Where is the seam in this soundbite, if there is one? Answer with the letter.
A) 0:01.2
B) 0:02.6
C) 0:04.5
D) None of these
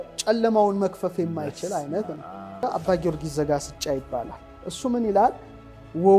B